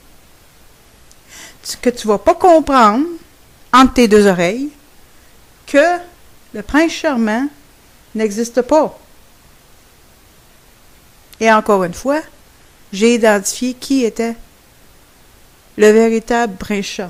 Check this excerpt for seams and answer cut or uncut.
uncut